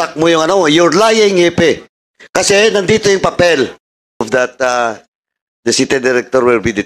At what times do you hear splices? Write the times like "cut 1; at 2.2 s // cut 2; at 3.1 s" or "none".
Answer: cut 1; at 4.3 s